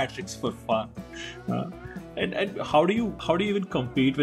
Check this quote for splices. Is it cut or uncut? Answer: uncut